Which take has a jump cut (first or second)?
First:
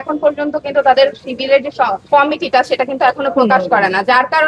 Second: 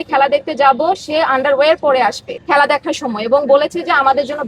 second